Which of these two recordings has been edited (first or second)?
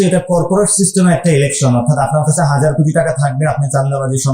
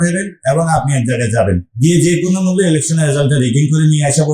second